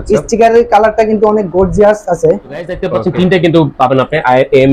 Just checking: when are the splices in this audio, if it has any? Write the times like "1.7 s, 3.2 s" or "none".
2.8 s